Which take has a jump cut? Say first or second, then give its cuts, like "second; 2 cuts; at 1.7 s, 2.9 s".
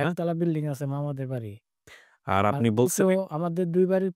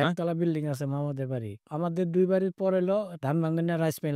second; 2 cuts; at 1.7 s, 3.2 s